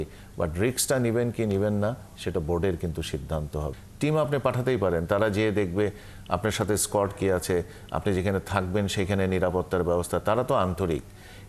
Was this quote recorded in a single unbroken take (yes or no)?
no